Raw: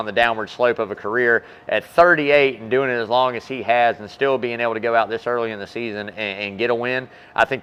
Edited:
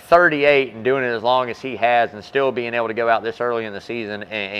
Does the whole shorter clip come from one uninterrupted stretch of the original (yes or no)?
yes